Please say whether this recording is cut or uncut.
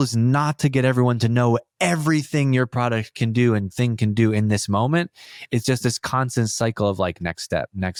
uncut